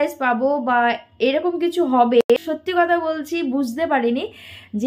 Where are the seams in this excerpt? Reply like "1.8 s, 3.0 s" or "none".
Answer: 2.2 s

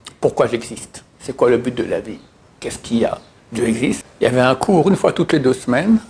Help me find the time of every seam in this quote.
4.0 s

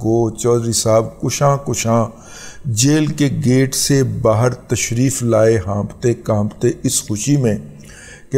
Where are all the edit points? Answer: none

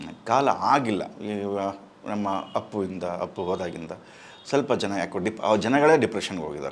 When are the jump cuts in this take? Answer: none

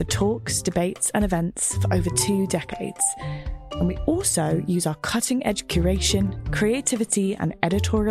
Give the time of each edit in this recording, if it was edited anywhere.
none

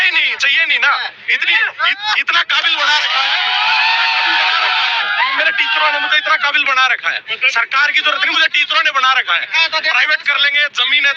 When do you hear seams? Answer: none

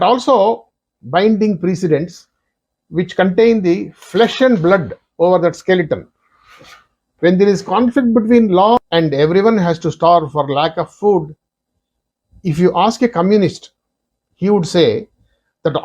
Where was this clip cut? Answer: 8.9 s

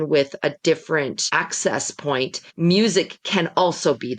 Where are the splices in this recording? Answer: 1.2 s, 2.4 s

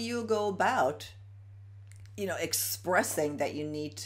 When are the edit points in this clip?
none

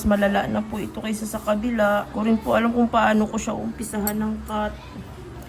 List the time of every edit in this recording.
2.1 s

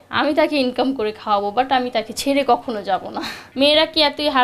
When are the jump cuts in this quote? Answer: 3.5 s

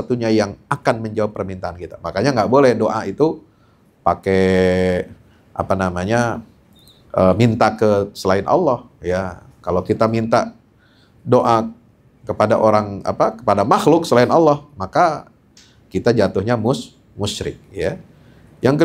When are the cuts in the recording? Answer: none

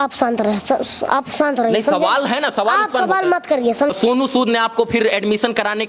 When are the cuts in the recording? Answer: 3.9 s

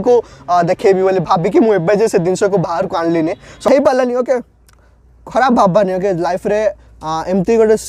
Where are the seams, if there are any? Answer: 3.7 s

